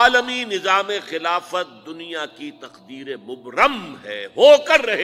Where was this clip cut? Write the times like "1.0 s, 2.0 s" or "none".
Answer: none